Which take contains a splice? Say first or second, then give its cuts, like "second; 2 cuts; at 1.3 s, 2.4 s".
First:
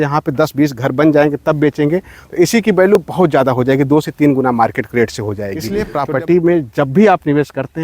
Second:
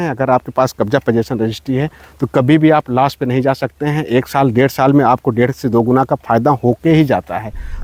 first; 1 cut; at 5.8 s